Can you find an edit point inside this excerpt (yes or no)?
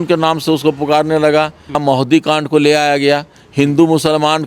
yes